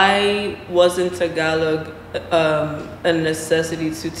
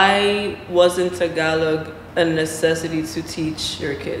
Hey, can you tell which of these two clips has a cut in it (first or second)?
second